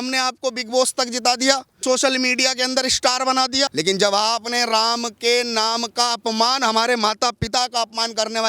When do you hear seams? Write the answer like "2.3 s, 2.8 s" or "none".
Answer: 1.8 s, 3.7 s

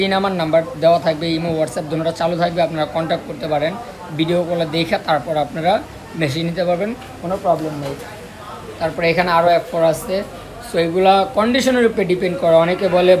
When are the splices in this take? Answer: none

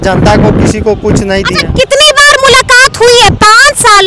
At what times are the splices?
none

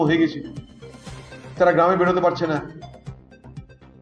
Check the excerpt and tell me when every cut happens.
2.8 s

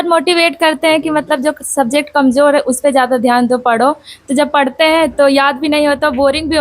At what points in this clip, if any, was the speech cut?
none

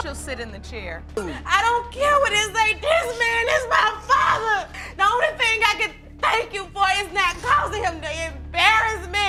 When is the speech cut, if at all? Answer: none

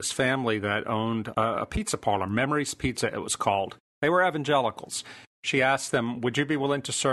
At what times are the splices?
1.3 s

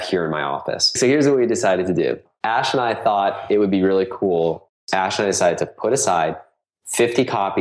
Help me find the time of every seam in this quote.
0.9 s, 2.3 s, 4.7 s

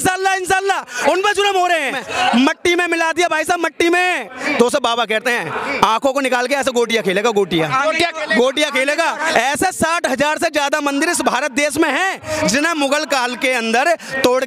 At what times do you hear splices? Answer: 2.0 s, 4.3 s, 9.2 s

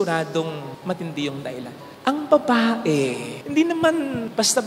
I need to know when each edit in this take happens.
none

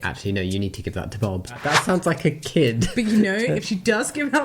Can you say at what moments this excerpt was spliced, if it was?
1.5 s

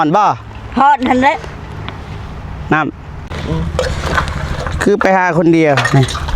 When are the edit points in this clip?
3.3 s

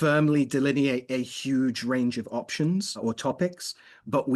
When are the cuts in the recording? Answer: 3.0 s

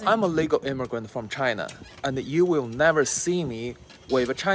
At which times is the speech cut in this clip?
none

